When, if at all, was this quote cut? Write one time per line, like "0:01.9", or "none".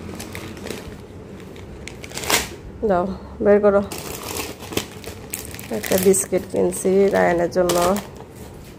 none